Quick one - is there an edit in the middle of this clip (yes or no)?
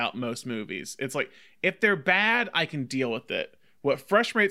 no